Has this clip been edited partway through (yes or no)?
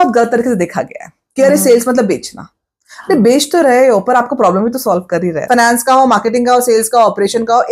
yes